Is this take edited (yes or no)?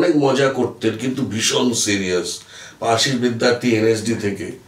no